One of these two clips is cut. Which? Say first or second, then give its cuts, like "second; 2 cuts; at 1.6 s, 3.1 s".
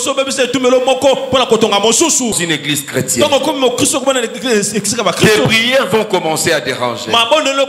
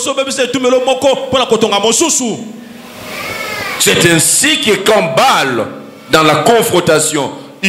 first; 1 cut; at 2.4 s